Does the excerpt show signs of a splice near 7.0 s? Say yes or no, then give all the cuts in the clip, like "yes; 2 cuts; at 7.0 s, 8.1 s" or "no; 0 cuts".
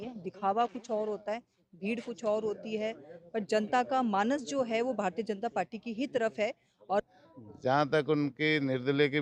yes; 1 cut; at 7.0 s